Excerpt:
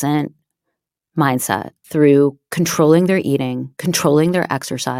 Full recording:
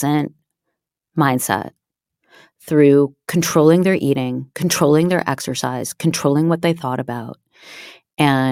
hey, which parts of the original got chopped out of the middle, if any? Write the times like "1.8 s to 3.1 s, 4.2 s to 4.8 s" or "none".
1.8 s to 2.5 s